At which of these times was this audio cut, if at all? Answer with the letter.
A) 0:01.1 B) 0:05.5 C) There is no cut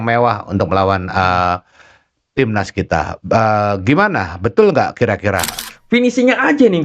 B